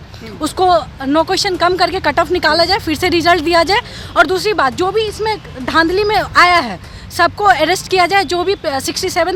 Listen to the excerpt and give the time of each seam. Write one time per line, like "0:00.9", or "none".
none